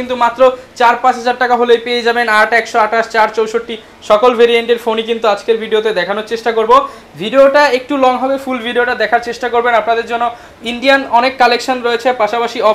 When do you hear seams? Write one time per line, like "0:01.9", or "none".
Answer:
none